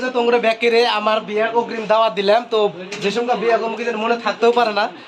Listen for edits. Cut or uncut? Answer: uncut